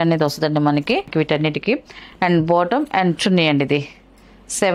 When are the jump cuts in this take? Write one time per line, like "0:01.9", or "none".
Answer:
0:01.1